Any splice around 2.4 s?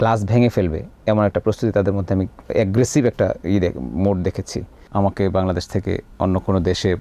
no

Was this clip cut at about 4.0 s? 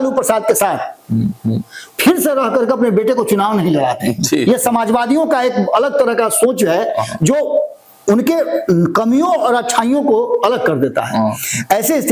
no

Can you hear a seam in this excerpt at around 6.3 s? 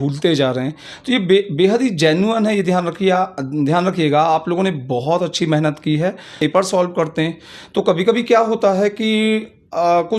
yes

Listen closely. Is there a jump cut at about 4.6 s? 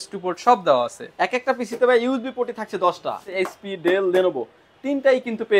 no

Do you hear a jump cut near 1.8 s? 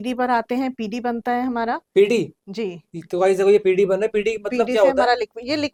no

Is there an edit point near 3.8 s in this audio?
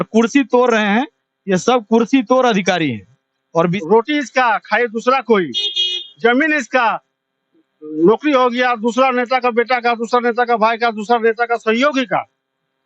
yes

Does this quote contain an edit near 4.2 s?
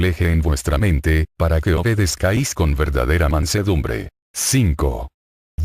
no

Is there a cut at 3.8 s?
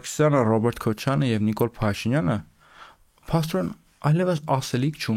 no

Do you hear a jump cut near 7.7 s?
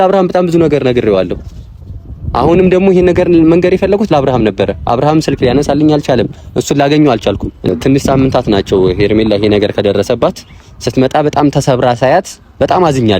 yes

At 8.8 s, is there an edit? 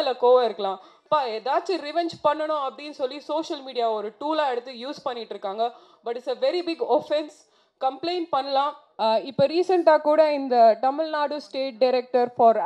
yes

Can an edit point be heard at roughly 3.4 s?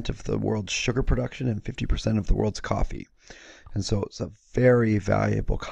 yes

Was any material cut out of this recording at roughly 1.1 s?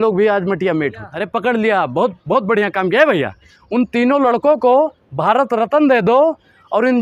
yes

